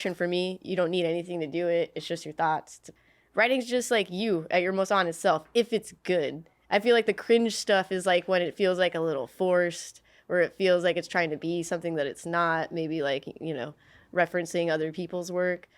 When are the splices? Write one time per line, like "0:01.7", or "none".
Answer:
0:02.9

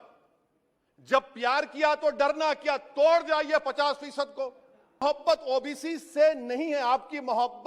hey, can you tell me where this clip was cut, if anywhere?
0:05.0

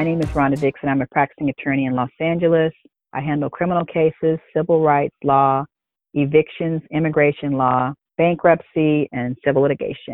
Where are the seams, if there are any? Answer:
0:02.9
0:08.0

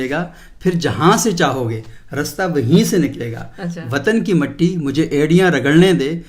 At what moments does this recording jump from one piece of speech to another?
none

